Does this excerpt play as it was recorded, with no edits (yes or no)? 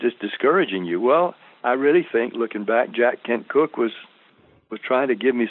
yes